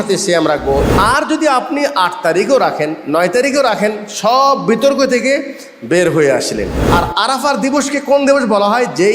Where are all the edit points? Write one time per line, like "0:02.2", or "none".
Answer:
0:00.9
0:06.8